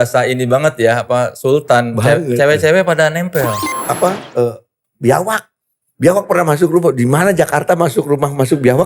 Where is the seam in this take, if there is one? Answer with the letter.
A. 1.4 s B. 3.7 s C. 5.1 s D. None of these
B